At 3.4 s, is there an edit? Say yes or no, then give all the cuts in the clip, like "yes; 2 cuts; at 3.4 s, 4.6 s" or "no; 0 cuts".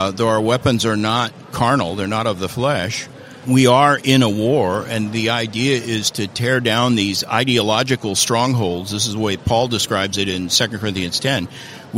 yes; 2 cuts; at 1.5 s, 3.4 s